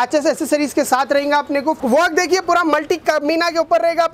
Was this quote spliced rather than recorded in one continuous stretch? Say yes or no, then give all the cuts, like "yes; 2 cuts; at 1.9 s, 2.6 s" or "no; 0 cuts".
yes; 1 cut; at 1.8 s